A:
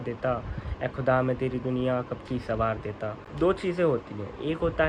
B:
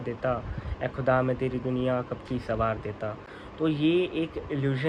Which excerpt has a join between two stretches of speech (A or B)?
A